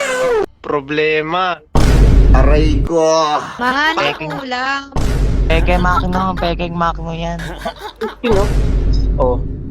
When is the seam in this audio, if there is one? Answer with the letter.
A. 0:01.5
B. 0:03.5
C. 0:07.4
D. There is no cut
B